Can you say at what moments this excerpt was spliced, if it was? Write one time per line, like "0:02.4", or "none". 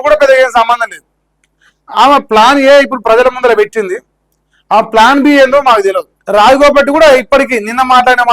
0:06.1

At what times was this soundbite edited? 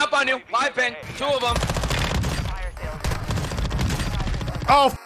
0:01.0

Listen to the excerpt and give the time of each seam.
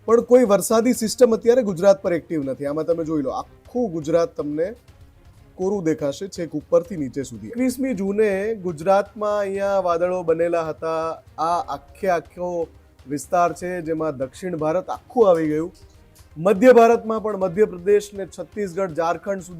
0:07.5

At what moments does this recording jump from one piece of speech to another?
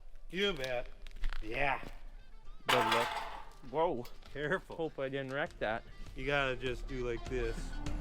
0:02.5

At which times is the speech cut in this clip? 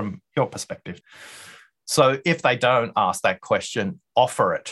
0:01.0

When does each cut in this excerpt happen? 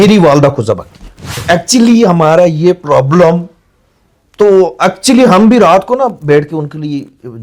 0:01.4

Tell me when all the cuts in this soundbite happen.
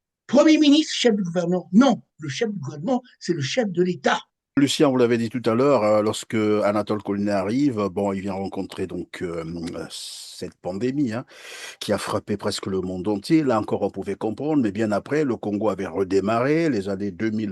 0:04.6

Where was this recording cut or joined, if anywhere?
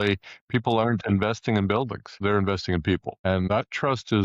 0:02.0
0:03.2

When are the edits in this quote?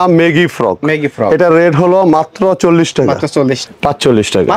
0:03.6

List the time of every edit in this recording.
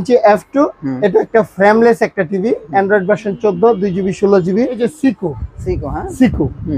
0:04.9

